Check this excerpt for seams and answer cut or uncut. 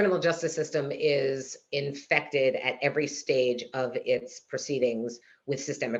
uncut